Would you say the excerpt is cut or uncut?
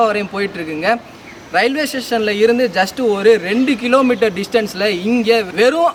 uncut